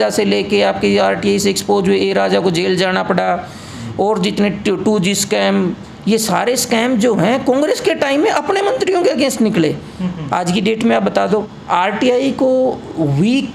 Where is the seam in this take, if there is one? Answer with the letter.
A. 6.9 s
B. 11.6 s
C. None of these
B